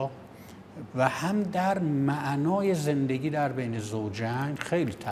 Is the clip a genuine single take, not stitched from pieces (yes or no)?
yes